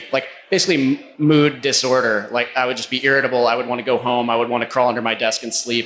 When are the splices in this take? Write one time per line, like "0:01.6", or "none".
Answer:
0:01.1